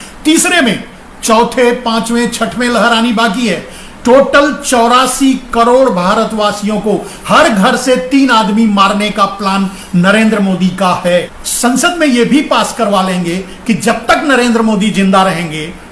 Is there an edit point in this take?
yes; 1 cut; at 11.4 s

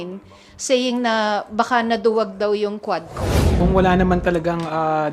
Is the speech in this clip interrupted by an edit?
yes; 1 cut; at 3.5 s

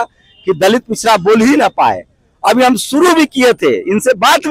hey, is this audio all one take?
yes; 0 cuts

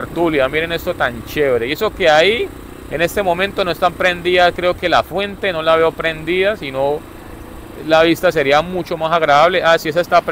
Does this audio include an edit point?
no; 0 cuts

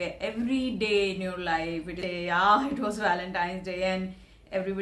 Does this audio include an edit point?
yes; 1 cut; at 2.0 s

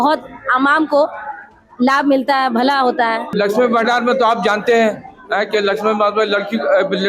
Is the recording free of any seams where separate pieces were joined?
no; 1 cut; at 3.3 s

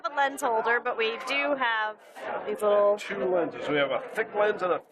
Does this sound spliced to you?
yes; 1 cut; at 1.5 s

